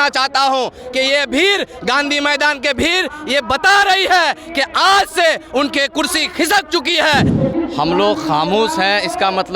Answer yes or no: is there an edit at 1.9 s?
no